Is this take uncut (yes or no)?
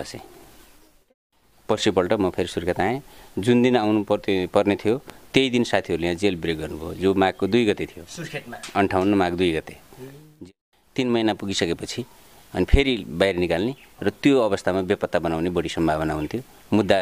no